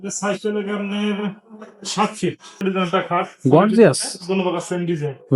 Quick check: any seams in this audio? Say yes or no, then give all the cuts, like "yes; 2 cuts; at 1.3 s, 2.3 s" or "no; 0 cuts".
yes; 1 cut; at 2.6 s